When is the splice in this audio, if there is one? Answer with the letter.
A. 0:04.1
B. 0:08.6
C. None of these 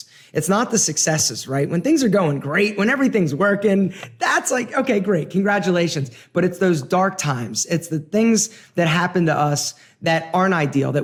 C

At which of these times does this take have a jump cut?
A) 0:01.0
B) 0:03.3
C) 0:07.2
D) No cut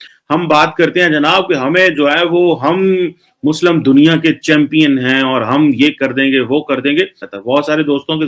C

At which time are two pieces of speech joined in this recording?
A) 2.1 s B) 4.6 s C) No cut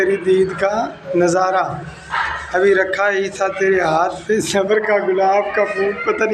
C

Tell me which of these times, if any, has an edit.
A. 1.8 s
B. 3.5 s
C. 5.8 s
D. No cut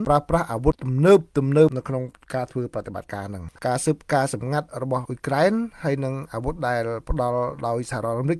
B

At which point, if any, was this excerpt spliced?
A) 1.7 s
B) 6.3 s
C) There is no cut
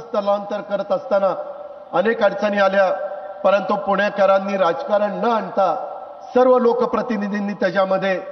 C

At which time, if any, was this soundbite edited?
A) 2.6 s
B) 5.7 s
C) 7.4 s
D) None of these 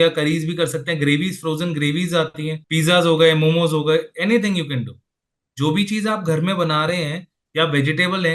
A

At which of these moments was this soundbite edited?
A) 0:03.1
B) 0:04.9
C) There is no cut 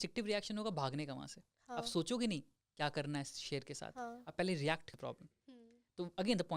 B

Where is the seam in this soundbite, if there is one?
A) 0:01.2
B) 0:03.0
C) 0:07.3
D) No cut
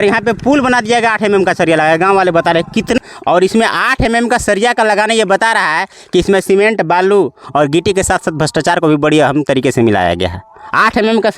B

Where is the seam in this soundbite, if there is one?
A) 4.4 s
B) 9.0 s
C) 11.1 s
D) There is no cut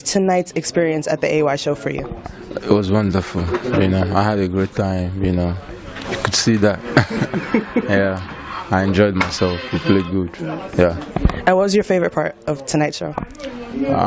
B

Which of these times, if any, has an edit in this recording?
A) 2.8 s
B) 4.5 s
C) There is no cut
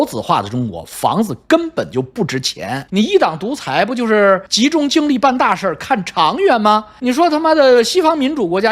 A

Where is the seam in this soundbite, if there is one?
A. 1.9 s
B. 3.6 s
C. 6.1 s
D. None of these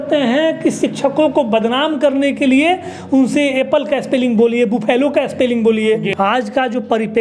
C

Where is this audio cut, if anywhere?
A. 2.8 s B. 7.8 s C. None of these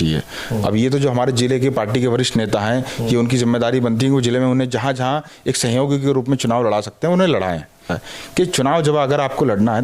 B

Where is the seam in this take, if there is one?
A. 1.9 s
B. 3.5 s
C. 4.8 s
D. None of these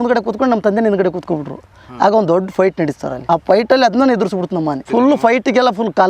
C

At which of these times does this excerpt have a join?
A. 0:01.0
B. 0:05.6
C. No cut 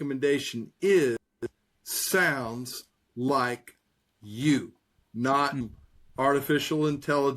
B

